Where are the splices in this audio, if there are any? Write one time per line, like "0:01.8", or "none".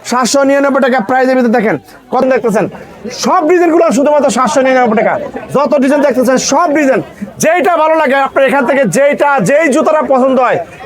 0:02.2